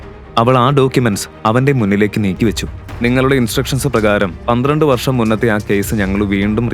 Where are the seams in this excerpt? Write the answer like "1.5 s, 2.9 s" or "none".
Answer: 2.8 s